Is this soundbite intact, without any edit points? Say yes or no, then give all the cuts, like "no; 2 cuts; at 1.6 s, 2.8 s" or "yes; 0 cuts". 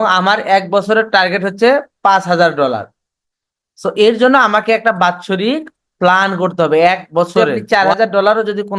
no; 1 cut; at 7.3 s